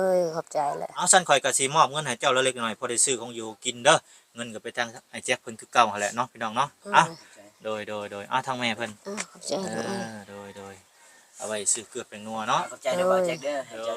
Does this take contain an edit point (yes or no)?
yes